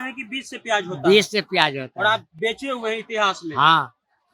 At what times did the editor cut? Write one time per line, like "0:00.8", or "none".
none